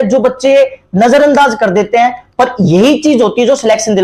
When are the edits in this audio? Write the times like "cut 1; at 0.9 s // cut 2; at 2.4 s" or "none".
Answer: none